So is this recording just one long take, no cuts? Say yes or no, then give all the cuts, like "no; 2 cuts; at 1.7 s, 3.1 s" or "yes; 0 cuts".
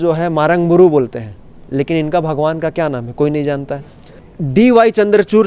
no; 1 cut; at 4.3 s